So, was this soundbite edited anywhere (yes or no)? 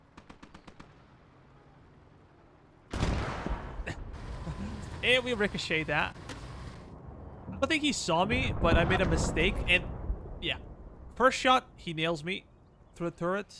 no